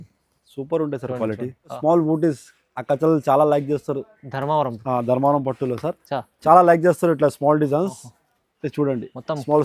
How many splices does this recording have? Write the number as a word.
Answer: one